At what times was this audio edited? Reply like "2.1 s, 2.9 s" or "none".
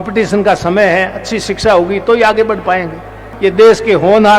3.2 s

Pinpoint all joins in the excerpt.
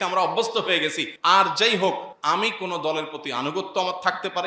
1.1 s, 2.1 s

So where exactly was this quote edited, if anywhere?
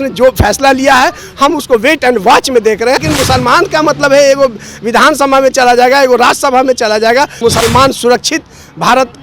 3.0 s, 7.4 s

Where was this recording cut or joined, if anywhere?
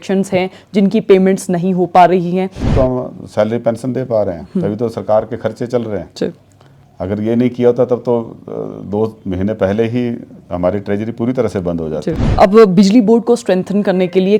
2.7 s, 12.2 s

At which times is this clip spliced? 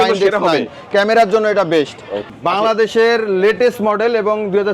2.2 s

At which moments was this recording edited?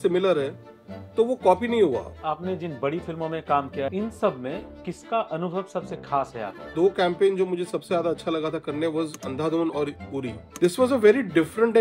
2.1 s, 3.9 s, 6.7 s, 10.4 s

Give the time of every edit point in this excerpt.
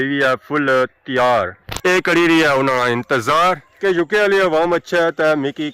none

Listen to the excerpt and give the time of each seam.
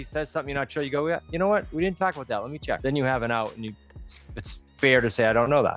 2.8 s

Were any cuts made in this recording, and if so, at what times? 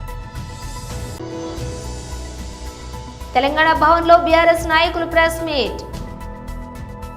1.2 s

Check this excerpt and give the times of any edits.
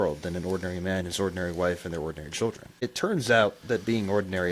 2.8 s

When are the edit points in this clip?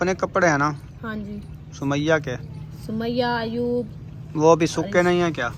none

